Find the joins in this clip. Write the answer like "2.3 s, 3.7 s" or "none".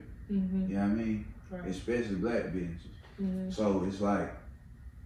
none